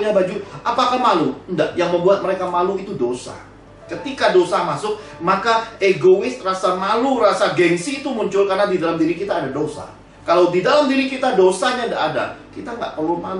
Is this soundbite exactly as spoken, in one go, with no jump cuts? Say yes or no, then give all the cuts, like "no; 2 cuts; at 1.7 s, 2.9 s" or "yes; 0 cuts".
yes; 0 cuts